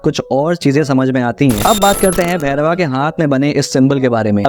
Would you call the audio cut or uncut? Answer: cut